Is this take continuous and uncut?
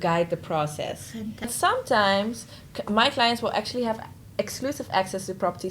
no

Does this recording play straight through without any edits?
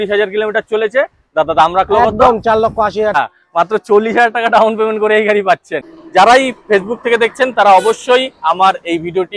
no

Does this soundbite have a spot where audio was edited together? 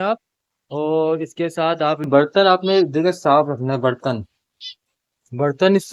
yes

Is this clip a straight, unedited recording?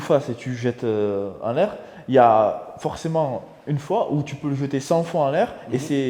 yes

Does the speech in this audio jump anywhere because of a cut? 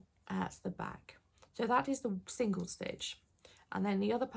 no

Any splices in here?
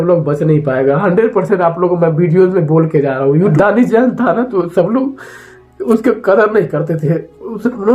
yes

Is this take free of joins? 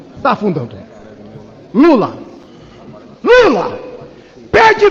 yes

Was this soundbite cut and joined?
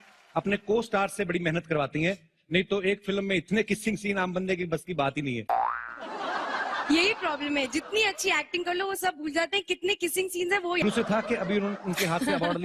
yes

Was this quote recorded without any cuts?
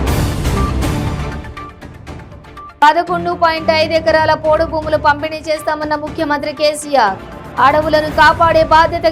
no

